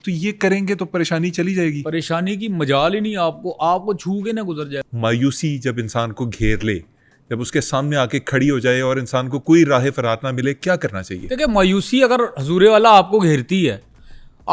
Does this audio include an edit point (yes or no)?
yes